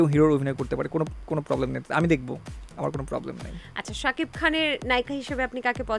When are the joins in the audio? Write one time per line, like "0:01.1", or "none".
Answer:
none